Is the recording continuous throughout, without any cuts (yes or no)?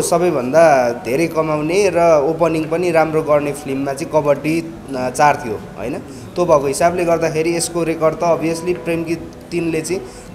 yes